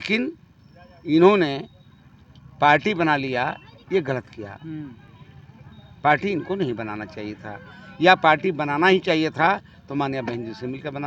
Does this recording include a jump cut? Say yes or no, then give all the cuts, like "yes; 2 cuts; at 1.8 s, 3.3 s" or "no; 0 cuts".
no; 0 cuts